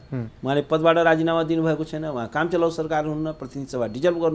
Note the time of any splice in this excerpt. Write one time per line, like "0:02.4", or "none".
none